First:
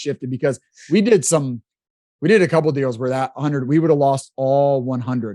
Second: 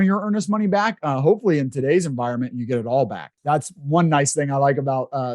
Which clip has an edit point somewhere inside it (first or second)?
second